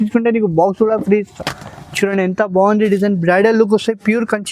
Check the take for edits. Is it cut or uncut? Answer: uncut